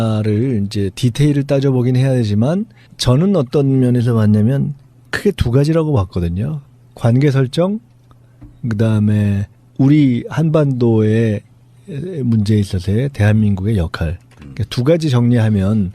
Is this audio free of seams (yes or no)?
no